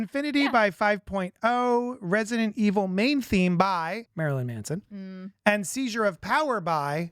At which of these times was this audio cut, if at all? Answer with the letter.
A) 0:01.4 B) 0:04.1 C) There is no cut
B